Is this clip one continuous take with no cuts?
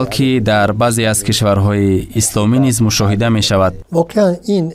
no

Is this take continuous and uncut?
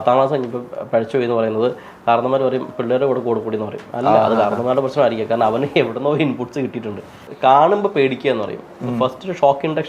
no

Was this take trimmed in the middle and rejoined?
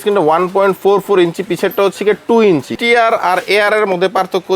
yes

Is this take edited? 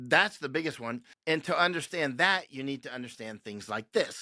yes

